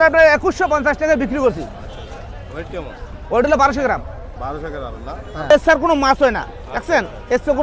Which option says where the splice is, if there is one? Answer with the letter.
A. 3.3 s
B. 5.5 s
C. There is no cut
B